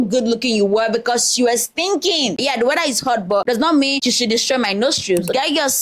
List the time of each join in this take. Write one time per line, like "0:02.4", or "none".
none

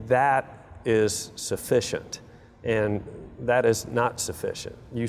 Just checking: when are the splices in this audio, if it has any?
none

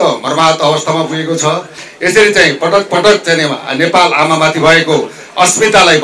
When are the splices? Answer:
0:01.8

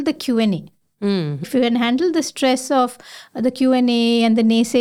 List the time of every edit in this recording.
0:01.4

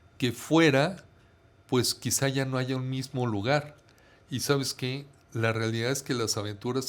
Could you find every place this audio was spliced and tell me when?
none

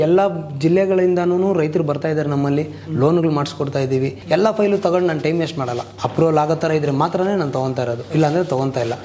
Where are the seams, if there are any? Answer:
0:04.2
0:05.9
0:08.0

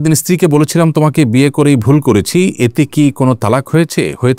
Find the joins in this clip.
none

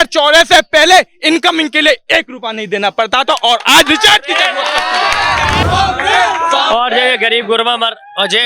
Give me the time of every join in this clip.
0:05.6

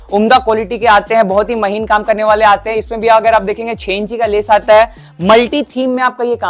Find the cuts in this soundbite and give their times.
none

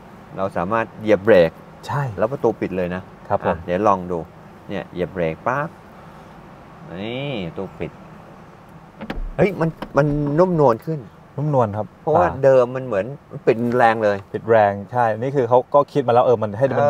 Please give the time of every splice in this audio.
none

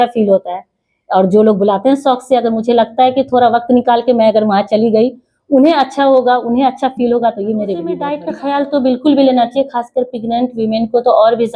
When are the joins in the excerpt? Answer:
0:08.2

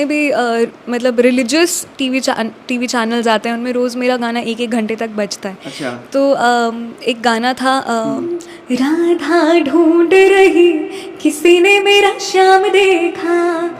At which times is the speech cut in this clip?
0:08.3

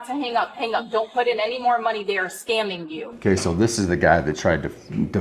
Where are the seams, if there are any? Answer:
0:03.0

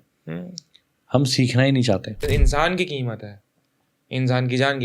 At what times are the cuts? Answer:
0:02.2

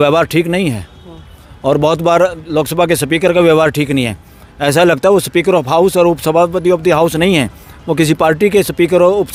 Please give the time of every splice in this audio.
none

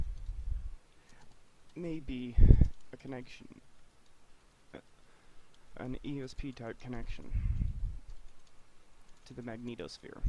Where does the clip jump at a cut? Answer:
none

